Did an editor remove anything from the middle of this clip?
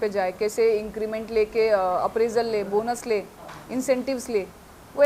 no; 0 cuts

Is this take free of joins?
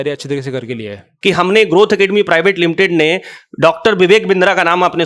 no; 1 cut; at 1.1 s

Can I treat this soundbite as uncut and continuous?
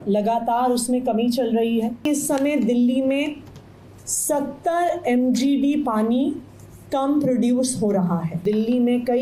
no; 2 cuts; at 2.0 s, 8.4 s

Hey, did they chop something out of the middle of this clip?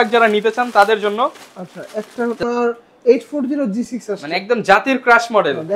yes; 1 cut; at 2.4 s

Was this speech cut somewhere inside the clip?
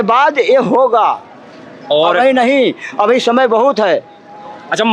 no; 0 cuts

